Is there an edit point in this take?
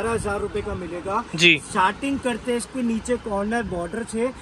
no; 0 cuts

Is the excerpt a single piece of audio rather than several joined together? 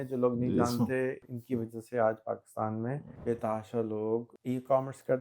no; 3 cuts; at 1.2 s, 3.1 s, 4.3 s

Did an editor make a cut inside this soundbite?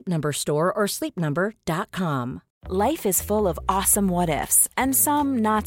yes; 1 cut; at 2.5 s

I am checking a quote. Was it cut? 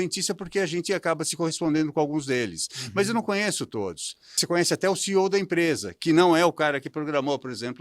yes; 1 cut; at 4.4 s

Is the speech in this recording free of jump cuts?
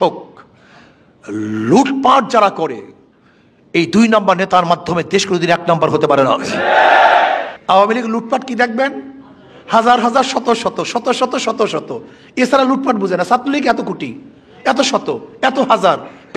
no; 1 cut; at 7.5 s

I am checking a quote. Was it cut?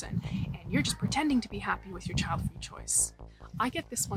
no; 0 cuts

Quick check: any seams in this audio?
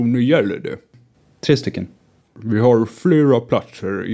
yes; 2 cuts; at 1.0 s, 2.1 s

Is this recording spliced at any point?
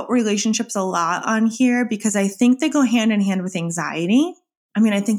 no; 0 cuts

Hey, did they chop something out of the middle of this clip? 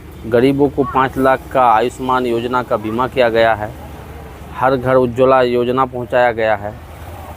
no; 0 cuts

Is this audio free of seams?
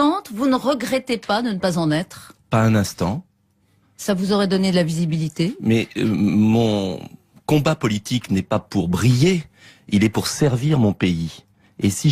no; 1 cut; at 8.1 s

